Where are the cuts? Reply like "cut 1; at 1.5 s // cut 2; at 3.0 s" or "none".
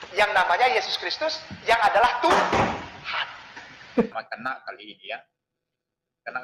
cut 1; at 4.1 s